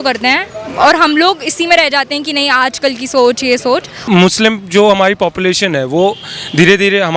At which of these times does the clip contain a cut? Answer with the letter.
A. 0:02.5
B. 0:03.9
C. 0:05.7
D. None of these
B